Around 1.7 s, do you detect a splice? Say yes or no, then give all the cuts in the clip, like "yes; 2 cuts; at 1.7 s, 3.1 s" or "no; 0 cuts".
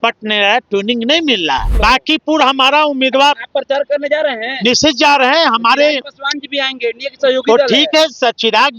yes; 1 cut; at 1.7 s